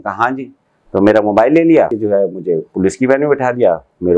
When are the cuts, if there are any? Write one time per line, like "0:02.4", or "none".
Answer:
0:02.0